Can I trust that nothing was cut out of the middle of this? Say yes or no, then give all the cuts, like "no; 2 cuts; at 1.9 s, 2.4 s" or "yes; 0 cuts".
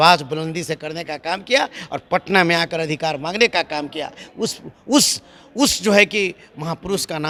yes; 0 cuts